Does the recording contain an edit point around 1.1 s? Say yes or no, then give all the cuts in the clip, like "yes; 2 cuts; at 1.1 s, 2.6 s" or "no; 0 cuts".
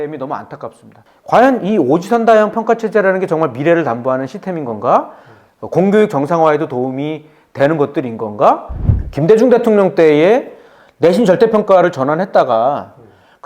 yes; 2 cuts; at 1.1 s, 8.7 s